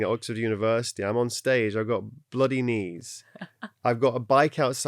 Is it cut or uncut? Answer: uncut